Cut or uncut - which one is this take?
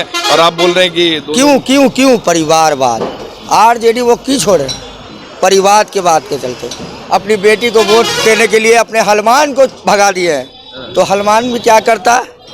uncut